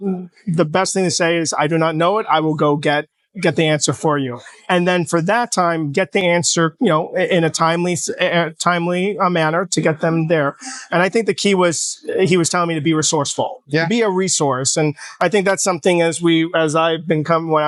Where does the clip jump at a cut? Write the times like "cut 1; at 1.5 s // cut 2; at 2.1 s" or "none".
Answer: none